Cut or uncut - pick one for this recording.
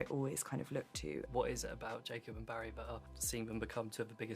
cut